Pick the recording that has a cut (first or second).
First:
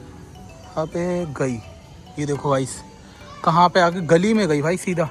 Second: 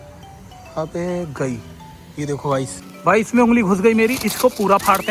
second